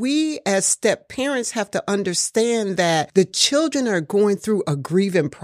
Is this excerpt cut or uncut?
uncut